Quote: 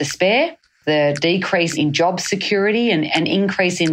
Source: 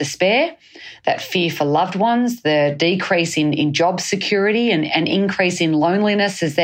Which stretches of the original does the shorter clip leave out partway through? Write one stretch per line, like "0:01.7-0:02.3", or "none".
0:00.8-0:02.4
0:03.3-0:03.5

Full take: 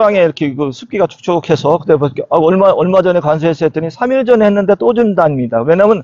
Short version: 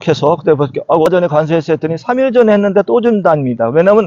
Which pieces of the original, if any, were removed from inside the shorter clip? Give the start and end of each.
0:02.5-0:03.0

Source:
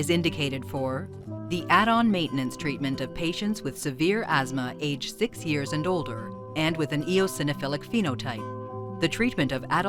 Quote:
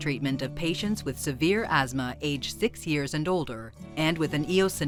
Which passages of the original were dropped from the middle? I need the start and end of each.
none

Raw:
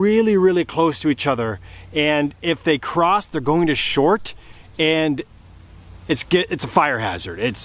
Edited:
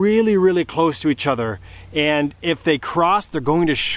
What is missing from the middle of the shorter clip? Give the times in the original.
none

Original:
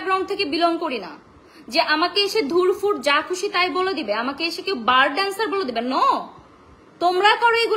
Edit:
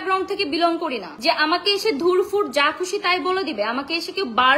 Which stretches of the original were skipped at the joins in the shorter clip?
0:01.1-0:01.6

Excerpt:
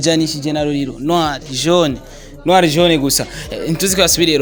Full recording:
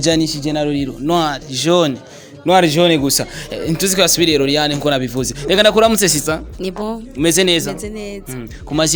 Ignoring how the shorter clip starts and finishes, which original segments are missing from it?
none

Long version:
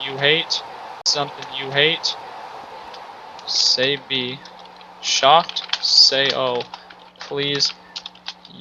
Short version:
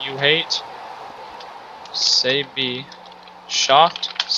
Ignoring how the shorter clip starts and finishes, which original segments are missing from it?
0:00.9-0:02.5

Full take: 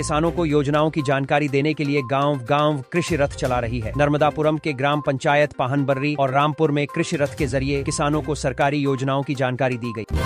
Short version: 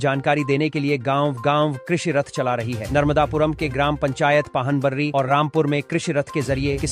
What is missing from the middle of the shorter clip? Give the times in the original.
none

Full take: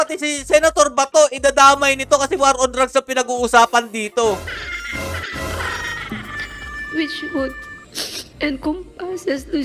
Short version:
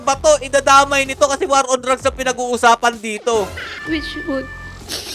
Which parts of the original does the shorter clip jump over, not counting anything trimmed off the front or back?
0:04.6-0:06.7

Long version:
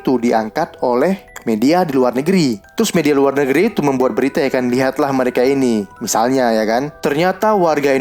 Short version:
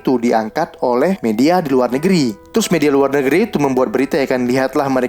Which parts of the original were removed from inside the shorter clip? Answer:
0:01.2-0:01.4

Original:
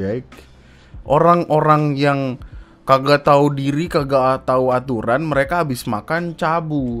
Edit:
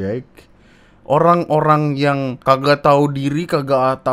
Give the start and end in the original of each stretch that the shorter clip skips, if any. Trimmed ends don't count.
0:02.3-0:02.7

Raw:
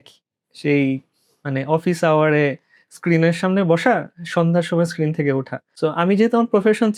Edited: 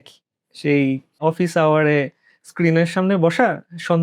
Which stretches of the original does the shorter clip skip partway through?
0:01.2-0:01.6

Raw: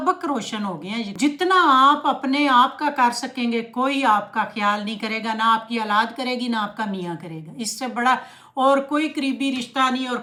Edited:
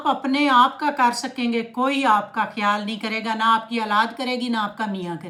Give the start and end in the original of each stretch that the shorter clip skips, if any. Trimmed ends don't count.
none

